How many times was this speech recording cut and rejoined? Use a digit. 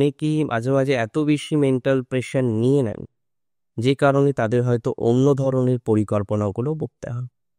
0